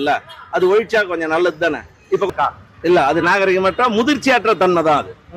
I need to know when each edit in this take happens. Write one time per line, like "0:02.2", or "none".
0:02.3